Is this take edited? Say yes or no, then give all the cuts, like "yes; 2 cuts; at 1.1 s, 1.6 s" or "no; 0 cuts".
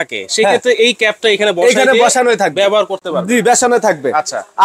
no; 0 cuts